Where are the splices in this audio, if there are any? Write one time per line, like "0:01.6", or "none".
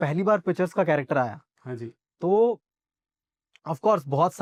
none

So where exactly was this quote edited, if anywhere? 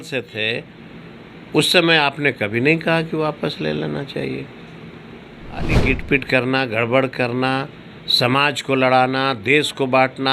0:05.8

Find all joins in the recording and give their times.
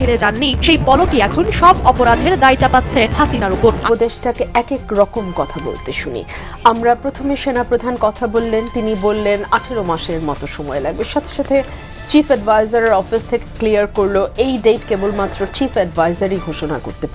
0:03.8

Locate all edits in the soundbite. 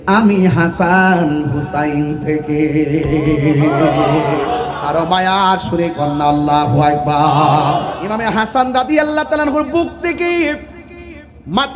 0:08.5

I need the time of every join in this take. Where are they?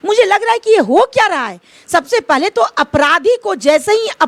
none

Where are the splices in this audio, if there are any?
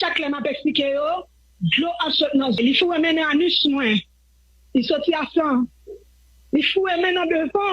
0:02.6

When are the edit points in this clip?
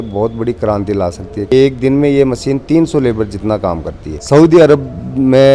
0:01.5
0:04.1

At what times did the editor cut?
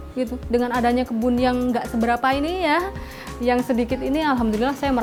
none

